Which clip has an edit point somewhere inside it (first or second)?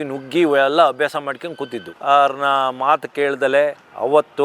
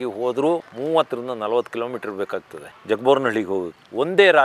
first